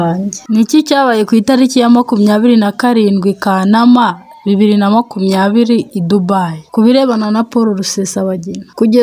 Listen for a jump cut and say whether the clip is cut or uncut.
uncut